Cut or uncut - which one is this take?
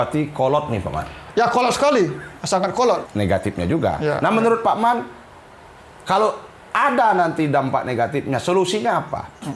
cut